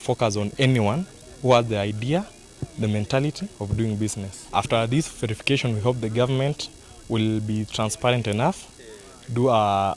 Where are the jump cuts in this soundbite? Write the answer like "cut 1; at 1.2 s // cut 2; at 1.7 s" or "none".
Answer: none